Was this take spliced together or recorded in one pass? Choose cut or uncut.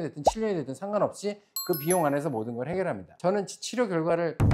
uncut